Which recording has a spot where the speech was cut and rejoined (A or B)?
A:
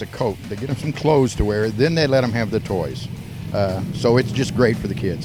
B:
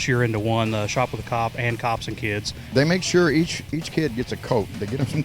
B